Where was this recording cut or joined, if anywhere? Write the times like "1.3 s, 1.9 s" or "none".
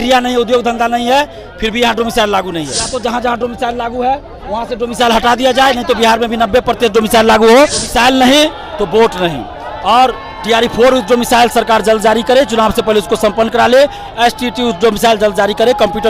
2.8 s, 7.8 s